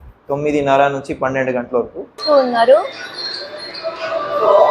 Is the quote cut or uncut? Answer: cut